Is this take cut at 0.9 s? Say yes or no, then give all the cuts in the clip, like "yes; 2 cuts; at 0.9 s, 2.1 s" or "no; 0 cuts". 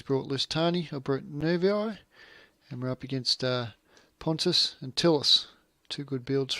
no; 1 cut; at 4.4 s